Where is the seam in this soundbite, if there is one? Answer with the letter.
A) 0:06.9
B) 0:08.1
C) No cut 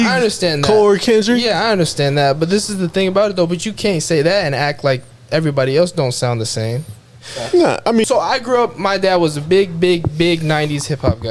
B